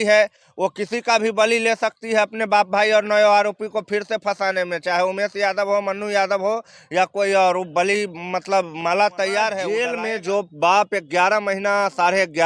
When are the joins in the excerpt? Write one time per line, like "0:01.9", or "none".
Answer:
0:09.8